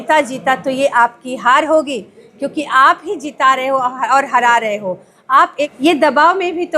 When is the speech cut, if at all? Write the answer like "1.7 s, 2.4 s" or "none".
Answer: 5.7 s